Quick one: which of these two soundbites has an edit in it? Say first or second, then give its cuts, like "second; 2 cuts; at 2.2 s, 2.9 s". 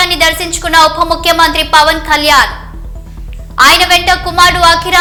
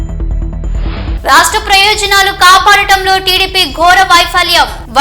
second; 1 cut; at 1.0 s